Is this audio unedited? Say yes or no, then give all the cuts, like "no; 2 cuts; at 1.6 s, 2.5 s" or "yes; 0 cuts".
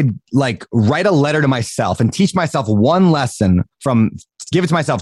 yes; 0 cuts